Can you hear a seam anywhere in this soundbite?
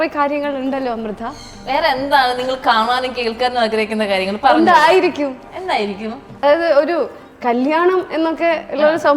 yes; 1 cut; at 6.3 s

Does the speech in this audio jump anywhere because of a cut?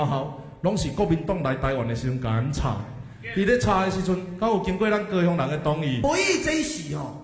yes; 1 cut; at 6.0 s

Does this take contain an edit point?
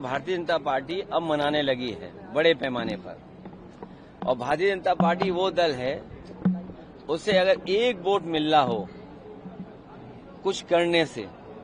no; 0 cuts

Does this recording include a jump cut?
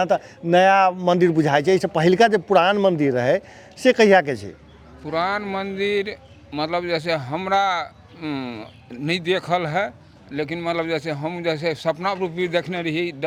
no; 0 cuts

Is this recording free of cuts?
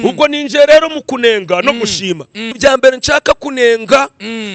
no; 1 cut; at 2.5 s

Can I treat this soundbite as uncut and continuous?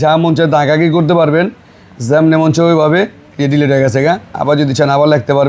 yes; 0 cuts

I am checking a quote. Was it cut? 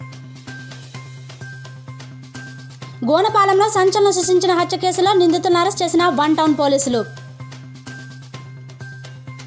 no; 0 cuts

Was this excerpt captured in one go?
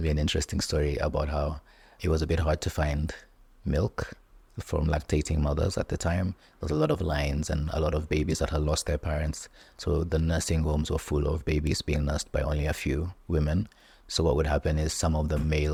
yes; 0 cuts

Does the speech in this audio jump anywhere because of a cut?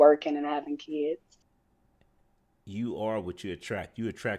yes; 1 cut; at 1.3 s

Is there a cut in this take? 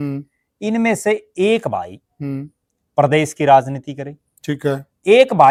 no; 0 cuts

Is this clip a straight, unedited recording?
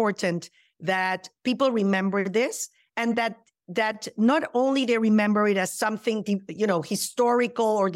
yes; 0 cuts

